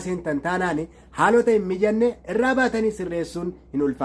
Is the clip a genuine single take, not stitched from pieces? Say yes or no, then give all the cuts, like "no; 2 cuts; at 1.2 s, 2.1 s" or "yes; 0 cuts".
yes; 0 cuts